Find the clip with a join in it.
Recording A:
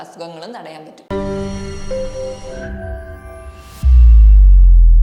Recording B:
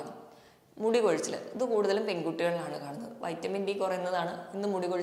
A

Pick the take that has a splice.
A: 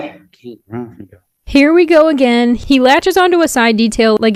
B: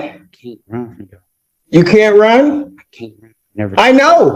B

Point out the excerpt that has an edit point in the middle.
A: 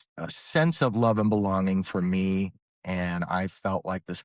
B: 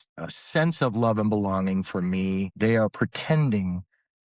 B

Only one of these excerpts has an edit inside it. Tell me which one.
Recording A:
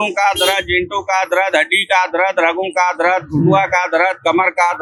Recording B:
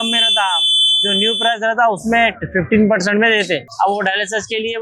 B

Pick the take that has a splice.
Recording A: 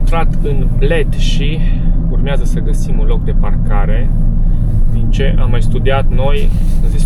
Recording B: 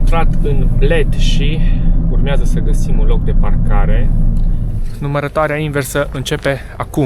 B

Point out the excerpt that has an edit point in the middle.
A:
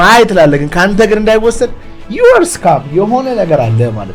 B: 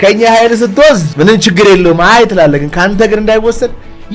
B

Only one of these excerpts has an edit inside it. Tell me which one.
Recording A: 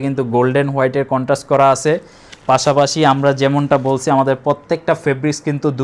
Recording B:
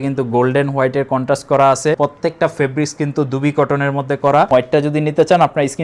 B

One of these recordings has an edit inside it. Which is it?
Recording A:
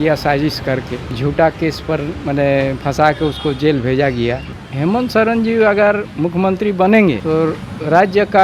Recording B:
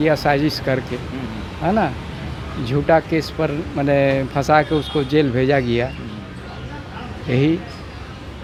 A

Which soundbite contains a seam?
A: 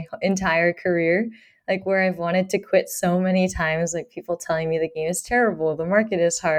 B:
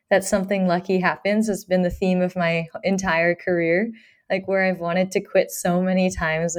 A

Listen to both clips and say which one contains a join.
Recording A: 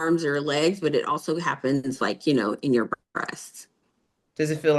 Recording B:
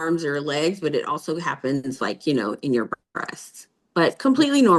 A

